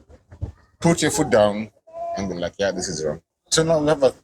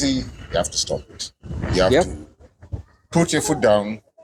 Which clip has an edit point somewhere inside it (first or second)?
first